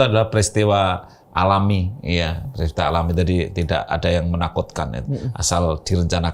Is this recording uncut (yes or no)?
yes